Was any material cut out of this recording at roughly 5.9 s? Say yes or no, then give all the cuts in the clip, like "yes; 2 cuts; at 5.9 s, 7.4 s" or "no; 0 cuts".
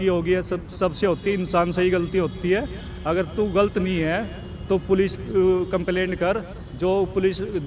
no; 0 cuts